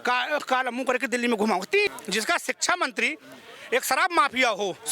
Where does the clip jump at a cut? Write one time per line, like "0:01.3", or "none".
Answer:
0:01.9